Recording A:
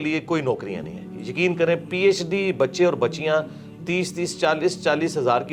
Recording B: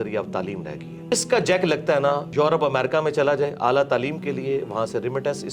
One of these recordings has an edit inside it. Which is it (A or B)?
B